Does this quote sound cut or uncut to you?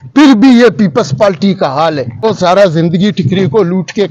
cut